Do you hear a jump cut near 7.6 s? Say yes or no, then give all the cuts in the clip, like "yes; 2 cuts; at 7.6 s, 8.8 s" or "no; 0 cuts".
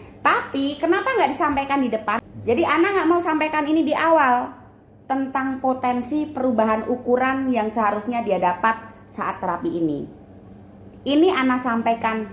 no; 1 cut; at 2.3 s